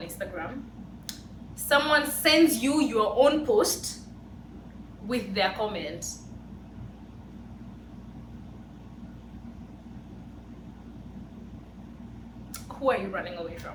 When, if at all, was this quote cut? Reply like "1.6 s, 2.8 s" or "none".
none